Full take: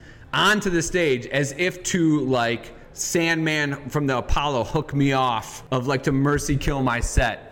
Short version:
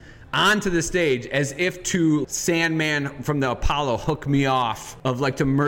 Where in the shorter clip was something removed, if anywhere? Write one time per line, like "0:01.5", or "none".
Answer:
0:02.2